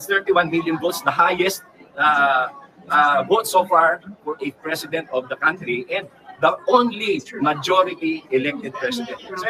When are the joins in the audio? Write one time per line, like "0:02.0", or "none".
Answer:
none